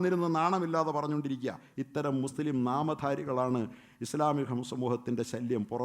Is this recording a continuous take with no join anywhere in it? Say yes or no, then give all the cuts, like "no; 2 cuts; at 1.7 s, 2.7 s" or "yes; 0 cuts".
yes; 0 cuts